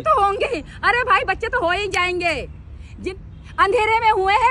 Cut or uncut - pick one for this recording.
cut